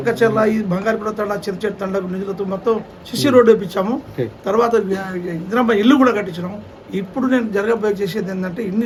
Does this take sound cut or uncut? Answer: uncut